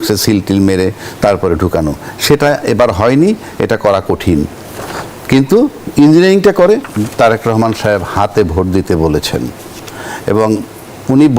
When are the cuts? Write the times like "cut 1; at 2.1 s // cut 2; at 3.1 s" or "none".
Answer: cut 1; at 6.9 s